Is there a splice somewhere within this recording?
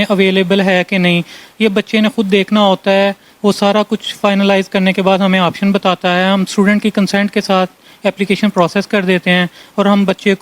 no; 0 cuts

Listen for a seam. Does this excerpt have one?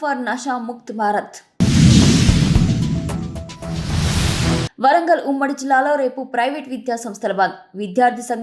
no; 0 cuts

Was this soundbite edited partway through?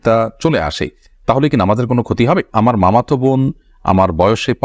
yes; 1 cut; at 2.5 s

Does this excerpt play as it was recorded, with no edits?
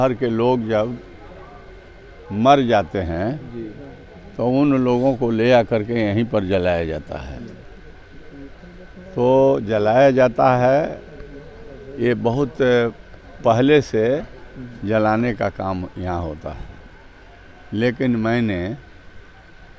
yes; 0 cuts

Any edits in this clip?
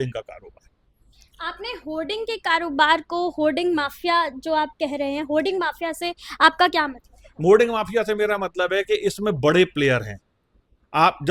no; 0 cuts

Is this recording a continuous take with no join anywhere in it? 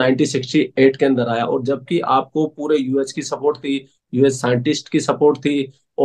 yes; 0 cuts

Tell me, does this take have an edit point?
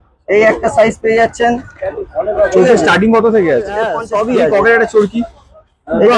yes; 1 cut; at 4.0 s

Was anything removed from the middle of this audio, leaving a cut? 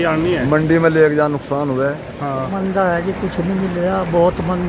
yes; 1 cut; at 2.5 s

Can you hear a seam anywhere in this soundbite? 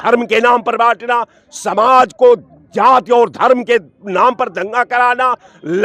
no; 0 cuts

